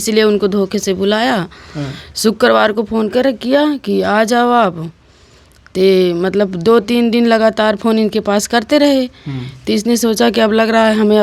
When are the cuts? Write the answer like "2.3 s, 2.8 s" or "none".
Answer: none